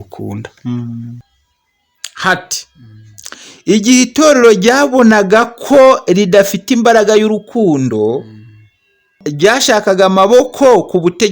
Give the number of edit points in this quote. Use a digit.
2